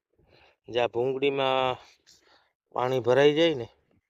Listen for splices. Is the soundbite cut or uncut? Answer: uncut